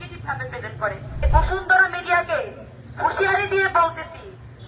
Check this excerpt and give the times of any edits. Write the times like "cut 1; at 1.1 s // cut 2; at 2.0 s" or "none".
cut 1; at 1.1 s